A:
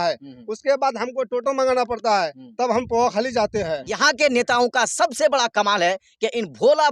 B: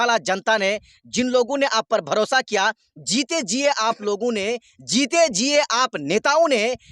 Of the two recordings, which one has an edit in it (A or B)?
A